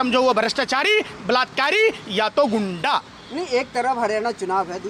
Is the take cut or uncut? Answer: uncut